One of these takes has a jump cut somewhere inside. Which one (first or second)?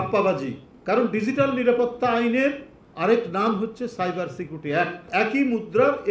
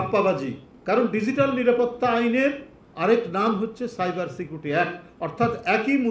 first